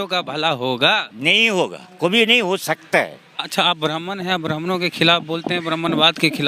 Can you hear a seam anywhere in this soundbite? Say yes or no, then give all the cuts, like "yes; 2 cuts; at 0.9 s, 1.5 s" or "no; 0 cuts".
yes; 1 cut; at 3.4 s